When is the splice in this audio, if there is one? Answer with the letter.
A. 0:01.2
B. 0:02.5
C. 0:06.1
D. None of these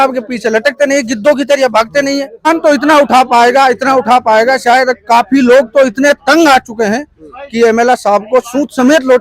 B